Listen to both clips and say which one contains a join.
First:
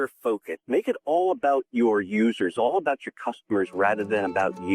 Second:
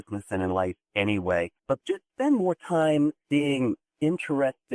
second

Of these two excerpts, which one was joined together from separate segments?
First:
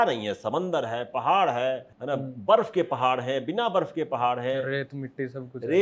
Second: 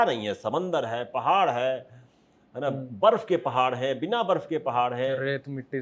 first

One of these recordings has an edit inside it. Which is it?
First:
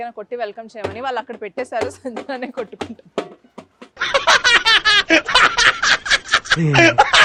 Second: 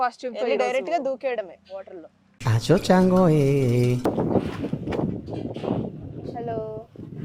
second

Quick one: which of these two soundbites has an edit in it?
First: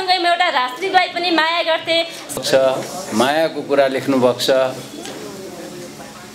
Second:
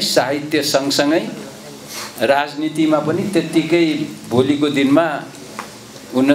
first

